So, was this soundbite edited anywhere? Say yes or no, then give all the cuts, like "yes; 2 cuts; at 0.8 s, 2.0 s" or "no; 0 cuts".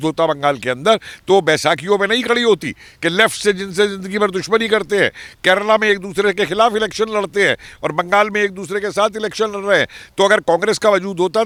no; 0 cuts